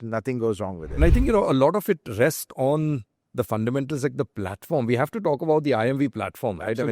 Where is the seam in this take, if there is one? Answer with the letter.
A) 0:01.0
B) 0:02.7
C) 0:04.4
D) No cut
A